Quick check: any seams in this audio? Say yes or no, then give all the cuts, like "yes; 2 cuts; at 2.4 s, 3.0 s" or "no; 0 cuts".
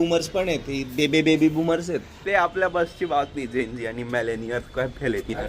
yes; 1 cut; at 2.1 s